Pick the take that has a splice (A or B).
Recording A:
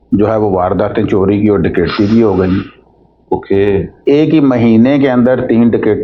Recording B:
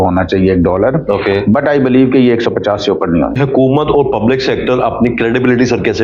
B